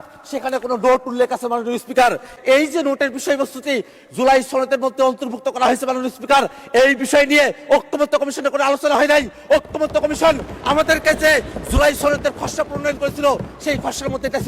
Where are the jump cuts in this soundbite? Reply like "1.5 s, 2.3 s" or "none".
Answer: 2.3 s